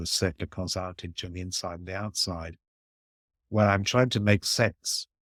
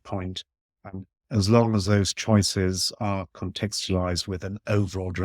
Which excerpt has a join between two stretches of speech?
second; 1 cut; at 1.1 s

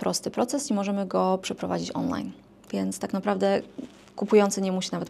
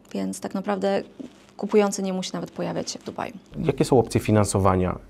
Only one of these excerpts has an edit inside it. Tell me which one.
second; 1 cut; at 3.6 s

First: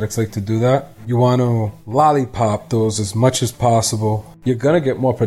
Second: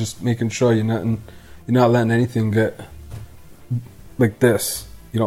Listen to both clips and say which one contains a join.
first; 3 cuts; at 1.0 s, 1.8 s, 4.3 s

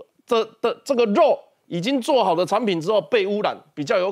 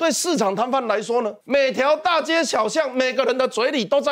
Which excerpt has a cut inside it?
second; 1 cut; at 1.4 s

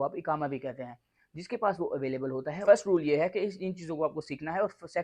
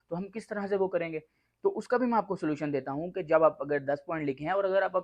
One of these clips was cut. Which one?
first; 1 cut; at 2.5 s

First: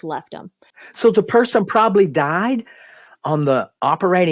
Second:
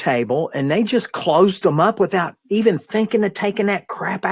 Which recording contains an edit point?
first; 1 cut; at 1.0 s

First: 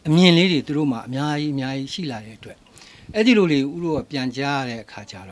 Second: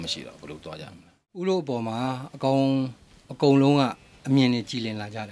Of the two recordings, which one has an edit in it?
second; 1 cut; at 1.2 s

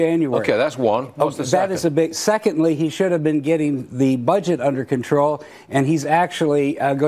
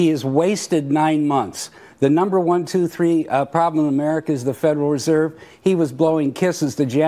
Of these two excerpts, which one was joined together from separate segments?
second; 1 cut; at 5.0 s

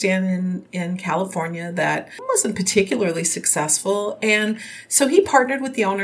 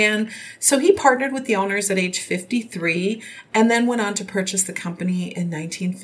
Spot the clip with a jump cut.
first; 1 cut; at 2.1 s

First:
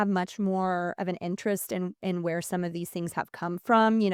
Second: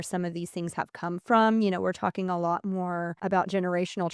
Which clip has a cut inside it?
second; 1 cut; at 3.1 s

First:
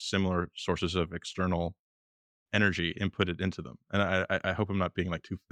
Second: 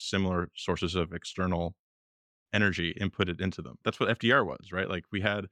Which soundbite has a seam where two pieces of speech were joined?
second; 1 cut; at 3.8 s

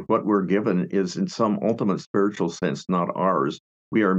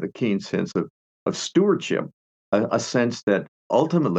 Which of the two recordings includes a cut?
second; 1 cut; at 2.1 s

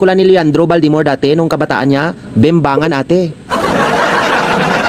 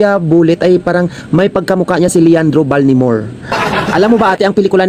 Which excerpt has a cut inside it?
second; 1 cut; at 3.5 s

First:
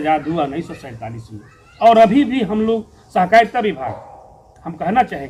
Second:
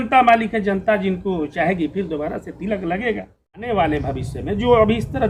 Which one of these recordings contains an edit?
second; 1 cut; at 3.6 s

